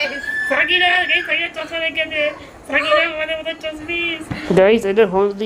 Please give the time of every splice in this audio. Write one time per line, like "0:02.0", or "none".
0:04.3